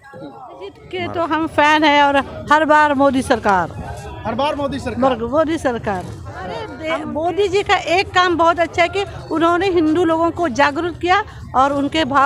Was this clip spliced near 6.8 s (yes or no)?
yes